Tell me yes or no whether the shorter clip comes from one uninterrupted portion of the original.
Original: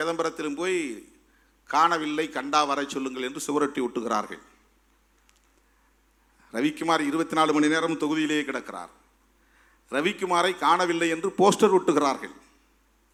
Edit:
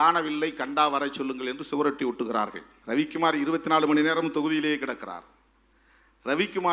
no